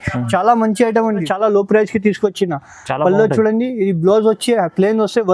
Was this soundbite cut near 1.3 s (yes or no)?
yes